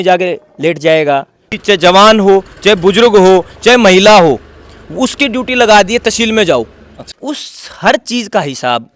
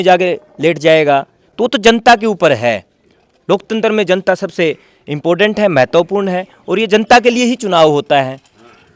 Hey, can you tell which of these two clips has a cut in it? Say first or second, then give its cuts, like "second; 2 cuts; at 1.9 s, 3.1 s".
first; 2 cuts; at 1.5 s, 7.2 s